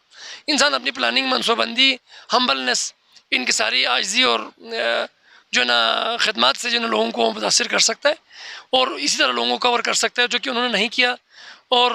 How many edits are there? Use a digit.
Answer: 0